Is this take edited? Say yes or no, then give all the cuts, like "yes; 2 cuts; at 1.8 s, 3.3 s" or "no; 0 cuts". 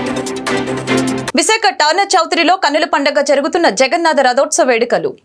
yes; 1 cut; at 1.2 s